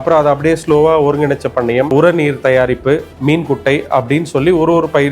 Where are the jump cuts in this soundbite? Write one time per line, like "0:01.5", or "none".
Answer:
0:01.9
0:03.1